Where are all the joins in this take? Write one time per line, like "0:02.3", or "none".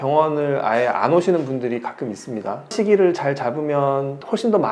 0:02.6